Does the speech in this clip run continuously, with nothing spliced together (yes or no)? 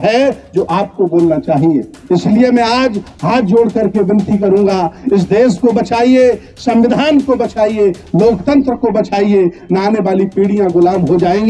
yes